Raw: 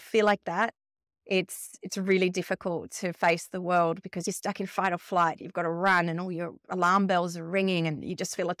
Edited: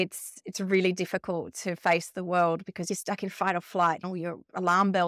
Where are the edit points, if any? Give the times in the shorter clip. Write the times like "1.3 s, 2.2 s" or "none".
4.0 s